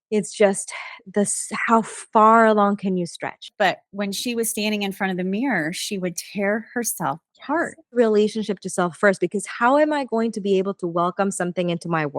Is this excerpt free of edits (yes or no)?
no